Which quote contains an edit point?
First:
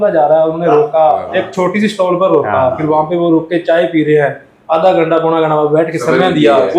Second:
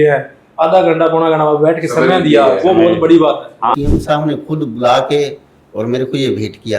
second; 1 cut; at 3.7 s

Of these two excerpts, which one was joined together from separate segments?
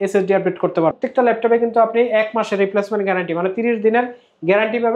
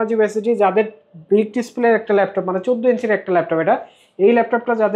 first; 1 cut; at 1.0 s

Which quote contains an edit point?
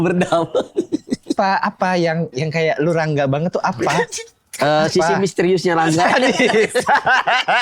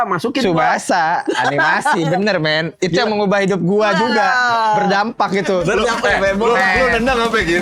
first; 1 cut; at 1.4 s

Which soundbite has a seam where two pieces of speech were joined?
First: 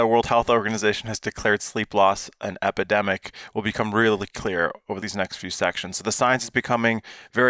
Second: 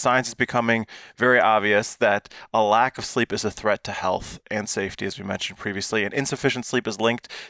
first; 1 cut; at 5.0 s

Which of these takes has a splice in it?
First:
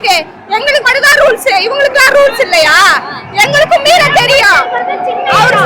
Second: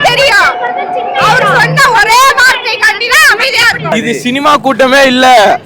second; 1 cut; at 3.9 s

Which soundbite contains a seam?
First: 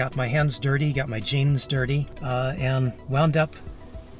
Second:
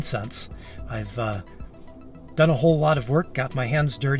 first; 1 cut; at 2.1 s

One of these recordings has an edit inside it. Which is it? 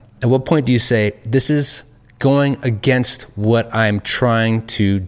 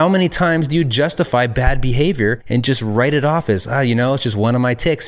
second; 1 cut; at 2.4 s

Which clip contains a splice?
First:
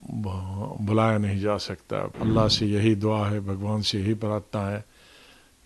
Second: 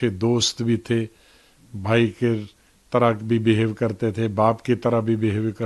first; 1 cut; at 2.1 s

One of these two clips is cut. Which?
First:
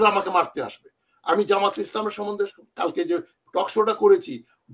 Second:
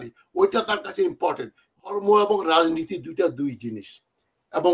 second; 1 cut; at 2.0 s

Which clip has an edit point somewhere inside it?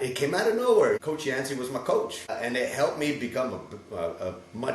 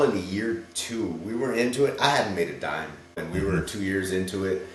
first; 2 cuts; at 1.0 s, 2.3 s

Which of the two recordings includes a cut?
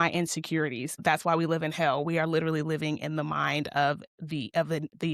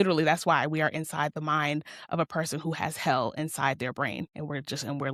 first; 1 cut; at 0.9 s

